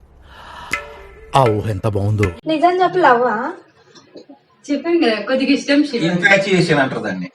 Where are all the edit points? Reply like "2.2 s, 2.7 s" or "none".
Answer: 2.4 s